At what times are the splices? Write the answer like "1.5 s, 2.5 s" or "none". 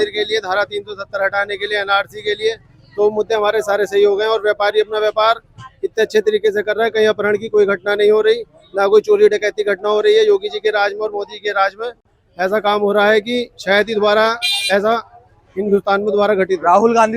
none